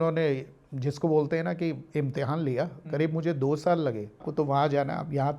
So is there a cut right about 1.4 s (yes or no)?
no